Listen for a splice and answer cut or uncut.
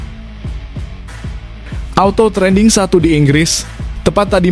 cut